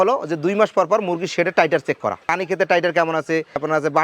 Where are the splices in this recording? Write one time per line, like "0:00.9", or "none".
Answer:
0:02.3